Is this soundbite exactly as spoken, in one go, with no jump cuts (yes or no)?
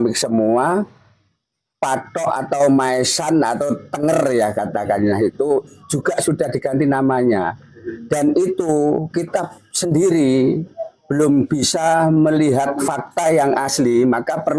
yes